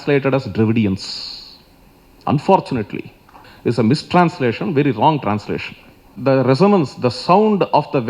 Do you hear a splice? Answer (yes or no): yes